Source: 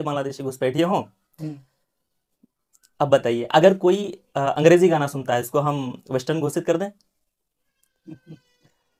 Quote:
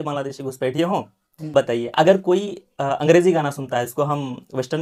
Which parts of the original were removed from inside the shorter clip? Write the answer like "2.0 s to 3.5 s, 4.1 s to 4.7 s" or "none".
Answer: 1.5 s to 3.1 s